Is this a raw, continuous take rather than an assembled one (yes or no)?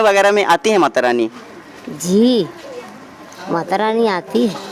yes